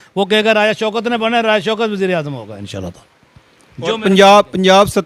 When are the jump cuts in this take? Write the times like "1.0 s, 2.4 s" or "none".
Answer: none